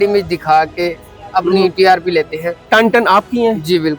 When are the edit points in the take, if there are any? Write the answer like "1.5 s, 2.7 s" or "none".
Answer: 2.6 s

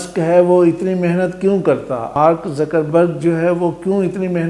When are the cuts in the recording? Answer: 2.1 s

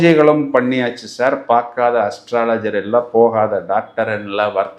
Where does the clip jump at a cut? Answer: none

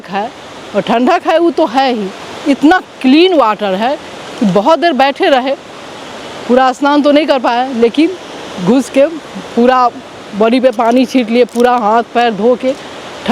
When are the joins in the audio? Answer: none

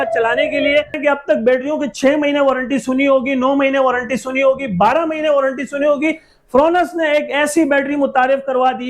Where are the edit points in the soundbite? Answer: 1.0 s

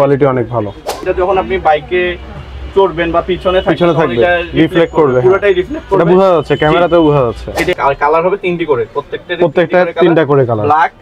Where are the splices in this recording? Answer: 1.1 s, 7.7 s

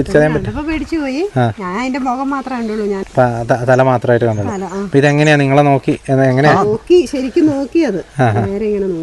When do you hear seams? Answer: 3.0 s

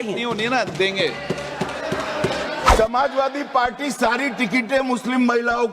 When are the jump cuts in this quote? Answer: 2.7 s

